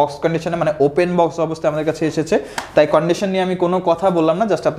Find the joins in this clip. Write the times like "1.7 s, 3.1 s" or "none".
none